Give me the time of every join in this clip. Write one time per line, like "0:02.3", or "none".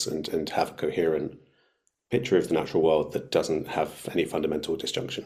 none